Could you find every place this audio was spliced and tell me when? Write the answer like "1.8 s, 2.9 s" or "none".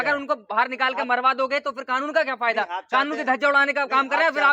none